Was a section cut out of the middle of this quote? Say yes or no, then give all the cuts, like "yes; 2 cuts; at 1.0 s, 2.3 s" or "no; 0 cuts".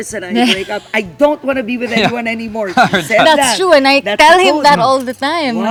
no; 0 cuts